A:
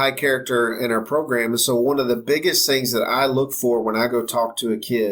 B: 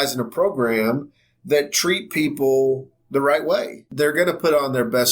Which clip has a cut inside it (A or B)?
B